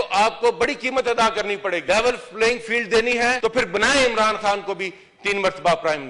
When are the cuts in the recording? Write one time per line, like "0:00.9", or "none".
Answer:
0:01.8
0:03.4